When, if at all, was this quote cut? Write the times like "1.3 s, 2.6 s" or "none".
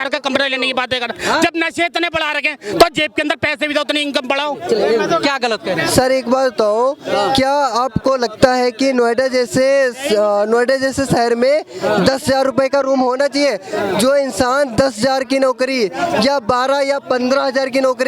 none